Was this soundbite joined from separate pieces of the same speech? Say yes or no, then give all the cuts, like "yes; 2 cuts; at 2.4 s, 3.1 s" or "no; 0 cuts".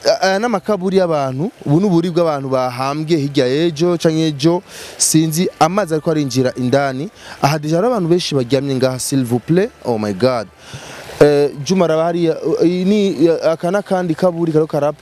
no; 0 cuts